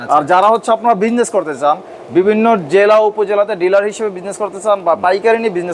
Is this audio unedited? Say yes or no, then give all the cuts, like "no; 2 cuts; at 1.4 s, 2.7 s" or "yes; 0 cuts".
yes; 0 cuts